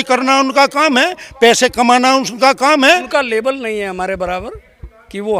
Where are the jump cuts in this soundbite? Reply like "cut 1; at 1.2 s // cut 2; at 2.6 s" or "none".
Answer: cut 1; at 3.1 s